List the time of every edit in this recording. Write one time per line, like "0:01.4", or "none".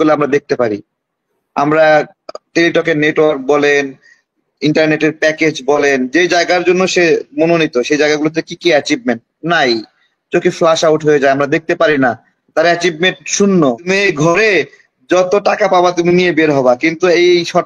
0:13.9